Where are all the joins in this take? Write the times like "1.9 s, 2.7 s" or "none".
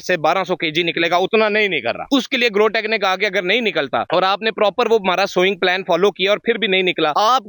none